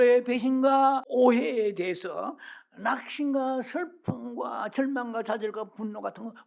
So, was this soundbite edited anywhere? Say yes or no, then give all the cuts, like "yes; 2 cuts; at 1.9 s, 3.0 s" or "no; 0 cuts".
yes; 1 cut; at 1.1 s